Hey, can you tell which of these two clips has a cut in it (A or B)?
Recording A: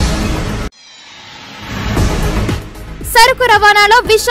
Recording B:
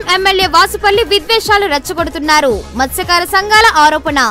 A